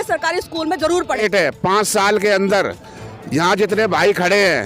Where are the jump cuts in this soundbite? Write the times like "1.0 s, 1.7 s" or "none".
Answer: 1.2 s